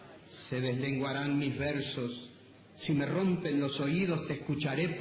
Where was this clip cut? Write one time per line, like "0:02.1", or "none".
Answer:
0:03.3